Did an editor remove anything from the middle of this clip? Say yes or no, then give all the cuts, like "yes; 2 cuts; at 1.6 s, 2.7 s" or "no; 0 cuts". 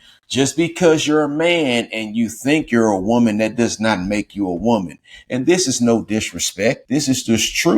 yes; 1 cut; at 6.8 s